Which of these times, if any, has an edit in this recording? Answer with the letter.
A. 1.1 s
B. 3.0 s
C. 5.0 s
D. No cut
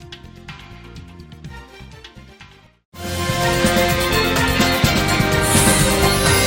D